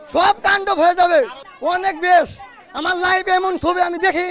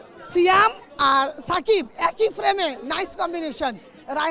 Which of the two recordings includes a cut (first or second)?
first